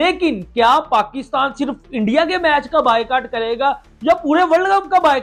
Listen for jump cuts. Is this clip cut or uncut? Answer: uncut